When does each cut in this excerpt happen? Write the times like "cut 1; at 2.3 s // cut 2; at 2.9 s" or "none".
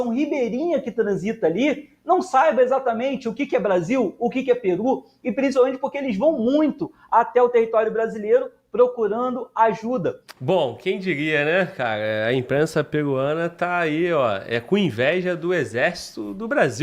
cut 1; at 10.3 s